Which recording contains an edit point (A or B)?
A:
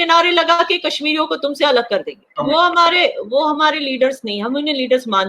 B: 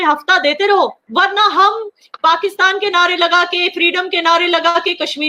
A